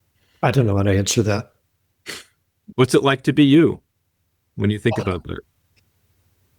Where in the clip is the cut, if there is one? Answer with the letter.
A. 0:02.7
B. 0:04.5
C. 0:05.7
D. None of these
A